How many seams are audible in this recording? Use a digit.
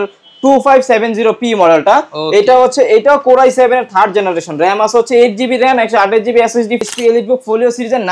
1